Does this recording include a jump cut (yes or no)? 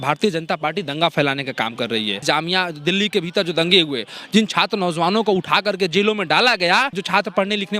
yes